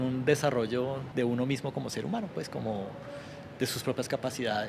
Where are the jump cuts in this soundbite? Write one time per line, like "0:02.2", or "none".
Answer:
0:01.0